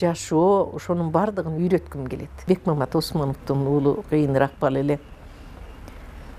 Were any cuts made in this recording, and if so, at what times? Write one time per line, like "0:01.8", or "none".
0:02.4

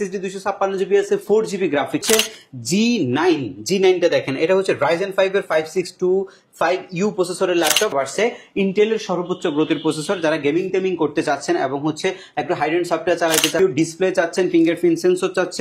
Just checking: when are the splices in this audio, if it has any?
0:02.0
0:07.9
0:13.6

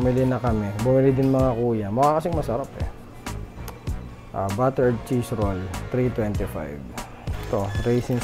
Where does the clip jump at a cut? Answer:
0:07.3

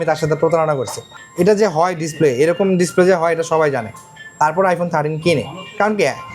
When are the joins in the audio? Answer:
none

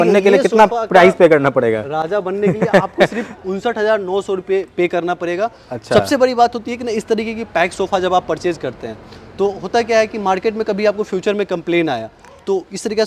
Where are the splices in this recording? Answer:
none

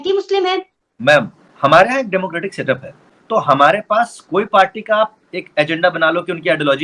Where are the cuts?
0:03.0

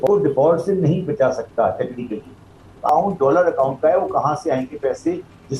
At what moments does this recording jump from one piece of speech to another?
0:02.9

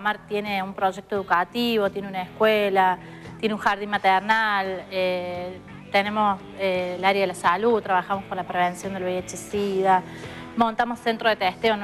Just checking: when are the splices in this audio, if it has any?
0:03.6

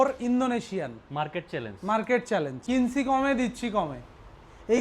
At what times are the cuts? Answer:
0:02.6

